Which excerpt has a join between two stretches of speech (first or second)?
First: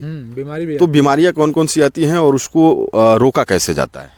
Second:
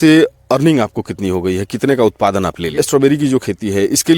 second